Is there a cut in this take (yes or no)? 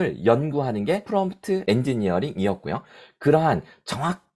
yes